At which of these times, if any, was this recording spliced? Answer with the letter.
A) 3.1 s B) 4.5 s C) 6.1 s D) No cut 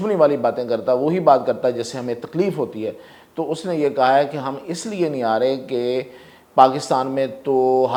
D